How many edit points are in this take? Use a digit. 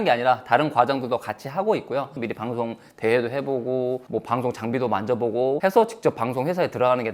1